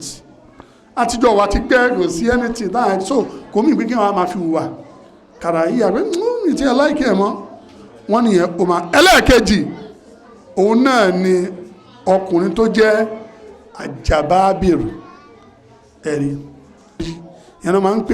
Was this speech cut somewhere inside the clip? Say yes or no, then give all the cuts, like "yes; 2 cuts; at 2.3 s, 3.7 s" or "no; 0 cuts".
yes; 1 cut; at 17.2 s